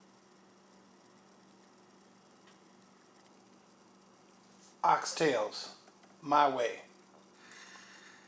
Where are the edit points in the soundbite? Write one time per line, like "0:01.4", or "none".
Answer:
0:01.2